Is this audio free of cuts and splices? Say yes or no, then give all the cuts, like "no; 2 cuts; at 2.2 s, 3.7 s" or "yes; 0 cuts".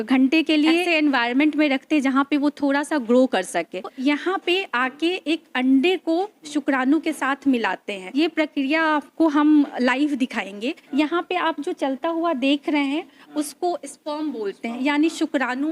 no; 4 cuts; at 0.9 s, 3.9 s, 8.0 s, 10.9 s